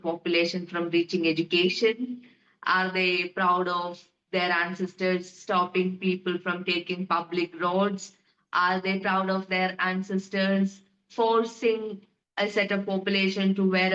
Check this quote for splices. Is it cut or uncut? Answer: uncut